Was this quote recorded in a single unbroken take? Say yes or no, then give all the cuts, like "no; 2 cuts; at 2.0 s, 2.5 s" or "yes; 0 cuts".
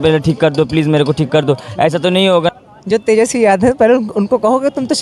no; 1 cut; at 2.5 s